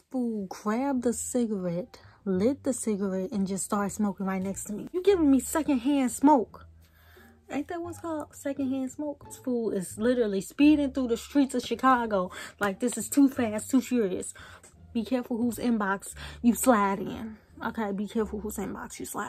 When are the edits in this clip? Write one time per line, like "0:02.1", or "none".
0:05.0
0:09.4
0:14.5

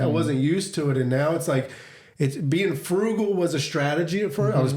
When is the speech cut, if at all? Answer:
none

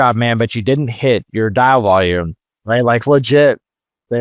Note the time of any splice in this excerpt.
0:01.3

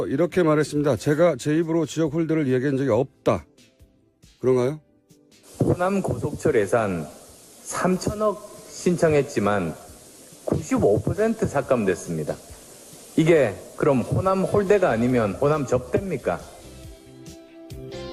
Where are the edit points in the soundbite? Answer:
0:04.8

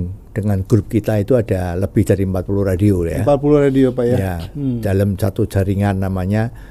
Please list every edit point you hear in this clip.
none

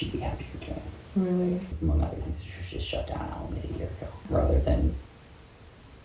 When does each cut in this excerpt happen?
0:01.7
0:04.3

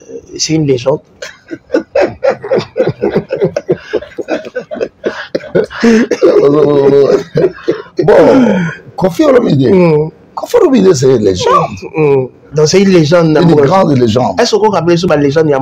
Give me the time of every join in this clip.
none

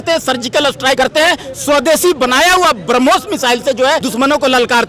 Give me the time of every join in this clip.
0:01.0
0:04.1

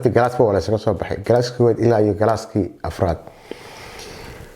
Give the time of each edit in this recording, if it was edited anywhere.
none

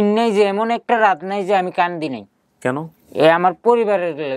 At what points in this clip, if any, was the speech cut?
0:03.0

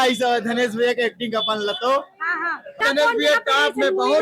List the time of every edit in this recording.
0:02.8

